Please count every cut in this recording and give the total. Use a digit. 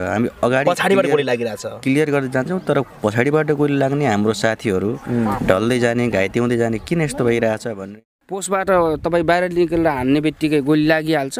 1